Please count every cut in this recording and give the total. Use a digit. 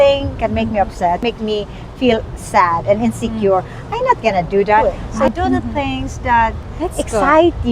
3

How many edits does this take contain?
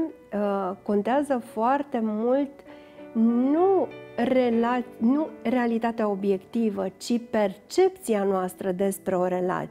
0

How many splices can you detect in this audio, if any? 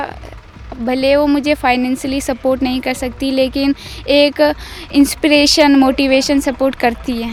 0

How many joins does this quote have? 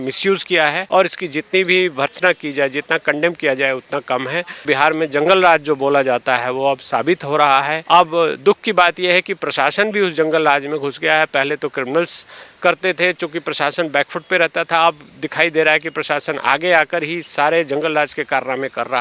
3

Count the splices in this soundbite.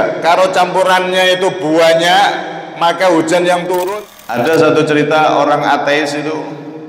1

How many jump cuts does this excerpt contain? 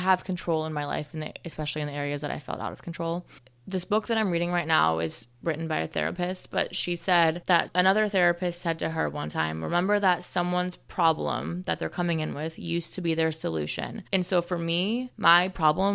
3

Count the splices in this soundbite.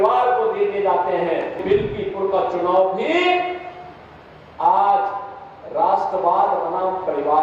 1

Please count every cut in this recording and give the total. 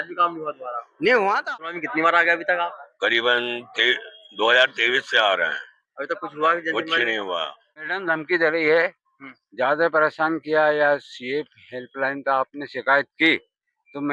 2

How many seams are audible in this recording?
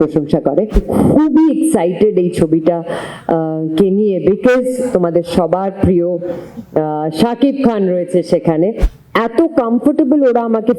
2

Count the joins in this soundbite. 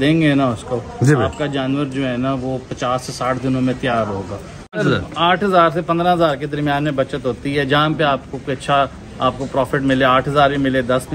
1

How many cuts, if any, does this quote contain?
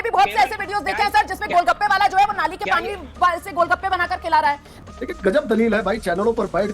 1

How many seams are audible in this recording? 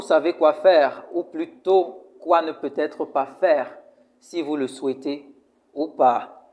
0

